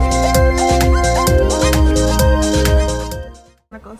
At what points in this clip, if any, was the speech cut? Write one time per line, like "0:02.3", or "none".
none